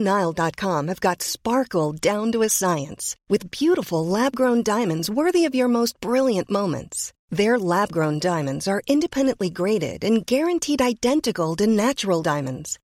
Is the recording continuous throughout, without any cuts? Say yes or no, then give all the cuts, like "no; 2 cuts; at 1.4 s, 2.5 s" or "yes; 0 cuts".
yes; 0 cuts